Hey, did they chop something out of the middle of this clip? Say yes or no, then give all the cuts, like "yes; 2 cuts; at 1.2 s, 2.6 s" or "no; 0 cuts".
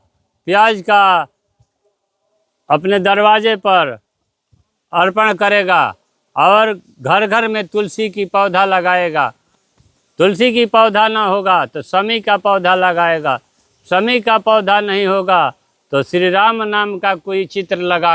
no; 0 cuts